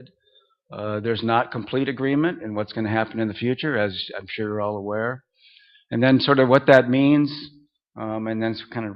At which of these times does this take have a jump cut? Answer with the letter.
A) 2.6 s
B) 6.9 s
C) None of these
B